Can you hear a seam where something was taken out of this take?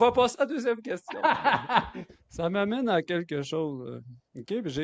yes; 1 cut; at 2.0 s

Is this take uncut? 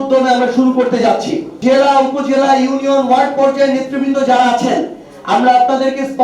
no; 1 cut; at 1.4 s

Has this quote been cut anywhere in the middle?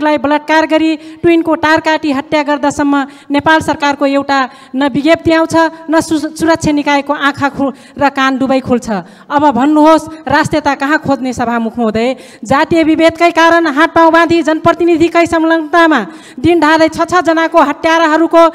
no; 0 cuts

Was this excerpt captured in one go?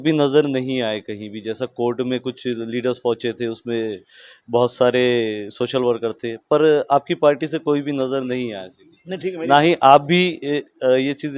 yes; 0 cuts

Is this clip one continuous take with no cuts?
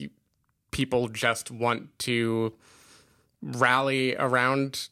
yes; 0 cuts

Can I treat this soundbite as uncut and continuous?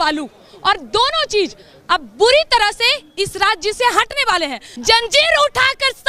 no; 1 cut; at 4.7 s

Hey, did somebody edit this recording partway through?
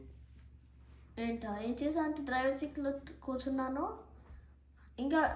no; 0 cuts

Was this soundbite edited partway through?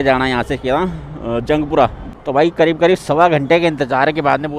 yes; 1 cut; at 2.0 s

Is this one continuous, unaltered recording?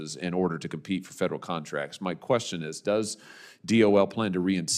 yes; 0 cuts

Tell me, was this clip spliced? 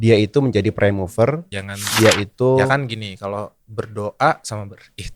yes; 1 cut; at 2.7 s

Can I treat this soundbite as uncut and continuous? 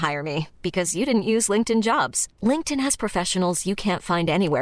yes; 0 cuts

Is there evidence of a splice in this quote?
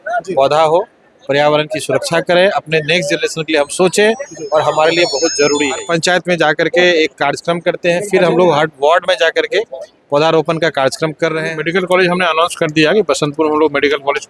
yes; 2 cuts; at 5.8 s, 11.5 s

